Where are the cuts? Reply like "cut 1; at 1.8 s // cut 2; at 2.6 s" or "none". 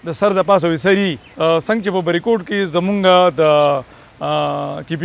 cut 1; at 1.2 s